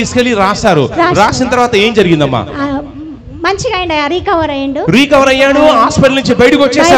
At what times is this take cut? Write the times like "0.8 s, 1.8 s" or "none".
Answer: none